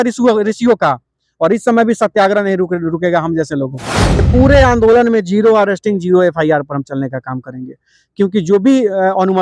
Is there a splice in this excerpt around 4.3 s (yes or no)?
yes